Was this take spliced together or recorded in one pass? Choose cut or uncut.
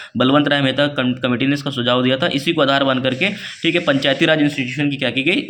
uncut